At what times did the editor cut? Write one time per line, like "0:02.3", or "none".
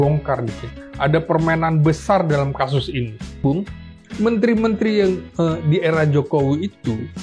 0:03.4